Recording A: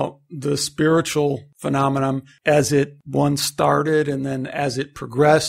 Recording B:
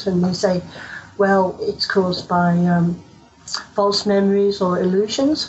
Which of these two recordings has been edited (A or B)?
A